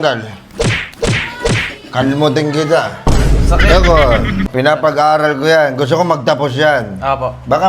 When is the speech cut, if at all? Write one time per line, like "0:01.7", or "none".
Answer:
0:04.5